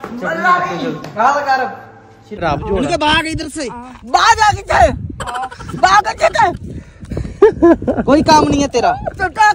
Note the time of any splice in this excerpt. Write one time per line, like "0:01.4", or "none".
0:02.4